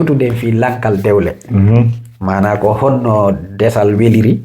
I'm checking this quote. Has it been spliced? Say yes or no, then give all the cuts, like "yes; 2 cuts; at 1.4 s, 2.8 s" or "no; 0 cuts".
no; 0 cuts